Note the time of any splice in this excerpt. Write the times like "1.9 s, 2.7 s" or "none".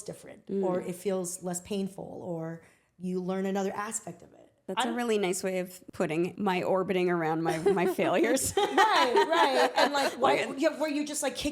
4.6 s, 6.3 s